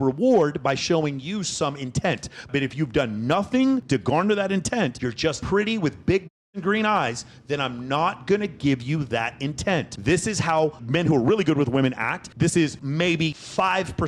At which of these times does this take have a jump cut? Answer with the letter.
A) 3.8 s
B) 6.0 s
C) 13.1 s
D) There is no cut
C